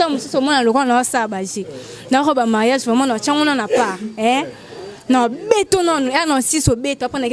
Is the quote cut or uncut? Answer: uncut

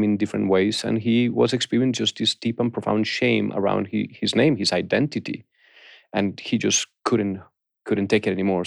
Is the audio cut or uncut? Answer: uncut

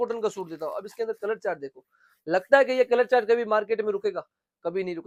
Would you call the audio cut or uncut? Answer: uncut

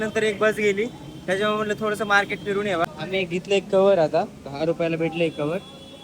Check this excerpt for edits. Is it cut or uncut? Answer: cut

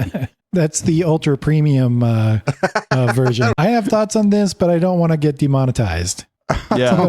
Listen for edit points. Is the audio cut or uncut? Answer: cut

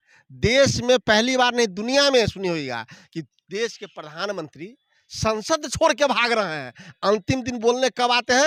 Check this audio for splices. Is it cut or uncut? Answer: uncut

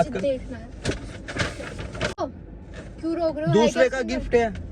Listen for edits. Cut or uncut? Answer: cut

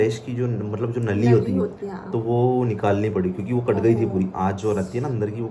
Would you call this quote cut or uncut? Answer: uncut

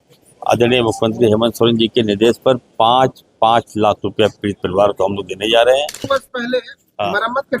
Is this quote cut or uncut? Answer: cut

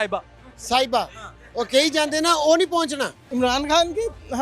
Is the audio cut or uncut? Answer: cut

